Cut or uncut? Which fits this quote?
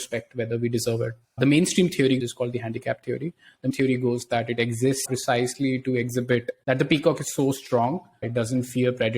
cut